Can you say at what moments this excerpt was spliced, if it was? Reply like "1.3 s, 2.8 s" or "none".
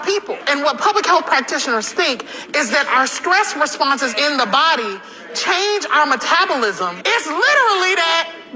none